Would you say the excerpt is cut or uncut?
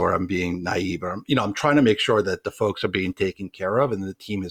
uncut